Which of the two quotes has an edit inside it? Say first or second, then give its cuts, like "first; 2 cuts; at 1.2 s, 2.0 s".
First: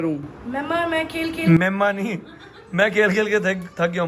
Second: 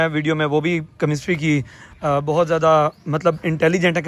first; 1 cut; at 2.4 s